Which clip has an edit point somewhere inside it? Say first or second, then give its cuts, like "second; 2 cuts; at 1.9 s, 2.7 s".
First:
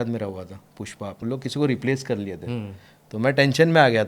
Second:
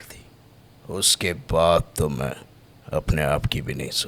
first; 1 cut; at 1.2 s